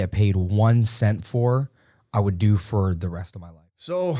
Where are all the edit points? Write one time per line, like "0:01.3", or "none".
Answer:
0:03.3